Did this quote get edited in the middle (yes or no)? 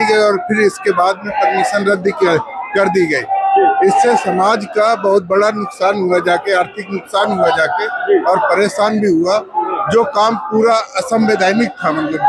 no